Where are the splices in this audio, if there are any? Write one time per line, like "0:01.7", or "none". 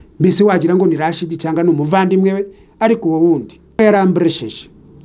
0:03.8